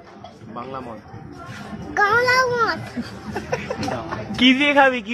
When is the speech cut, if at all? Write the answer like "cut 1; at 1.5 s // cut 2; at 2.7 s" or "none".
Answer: none